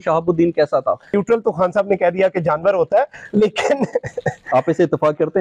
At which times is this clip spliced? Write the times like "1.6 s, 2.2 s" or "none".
1.1 s